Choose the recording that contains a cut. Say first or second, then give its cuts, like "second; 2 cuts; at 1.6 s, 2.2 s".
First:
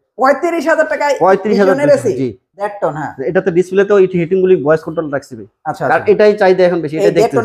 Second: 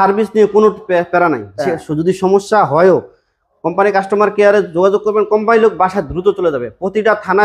first; 1 cut; at 2.6 s